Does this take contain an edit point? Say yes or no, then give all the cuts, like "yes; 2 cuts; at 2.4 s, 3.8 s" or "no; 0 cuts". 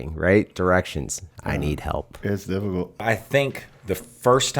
yes; 1 cut; at 3.0 s